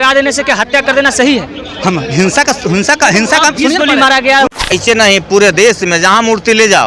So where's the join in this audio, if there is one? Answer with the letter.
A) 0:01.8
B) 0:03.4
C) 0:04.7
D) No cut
C